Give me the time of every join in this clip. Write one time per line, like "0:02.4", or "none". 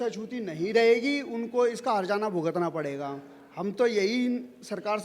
none